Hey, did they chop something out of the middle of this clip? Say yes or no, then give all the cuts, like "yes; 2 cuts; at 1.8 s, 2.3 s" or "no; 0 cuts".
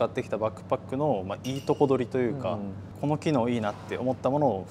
no; 0 cuts